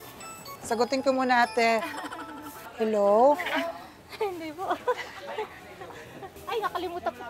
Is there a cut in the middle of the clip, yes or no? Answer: no